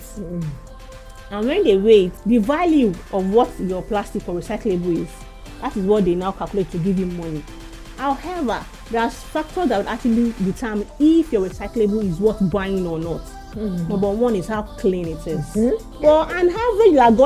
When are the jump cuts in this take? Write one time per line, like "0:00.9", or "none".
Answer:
0:02.2
0:03.0
0:15.9